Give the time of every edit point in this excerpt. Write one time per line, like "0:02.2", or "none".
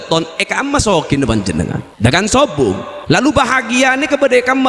0:01.8
0:02.9